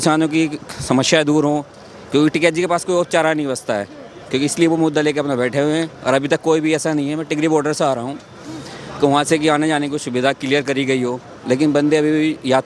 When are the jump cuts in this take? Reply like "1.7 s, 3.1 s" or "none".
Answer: none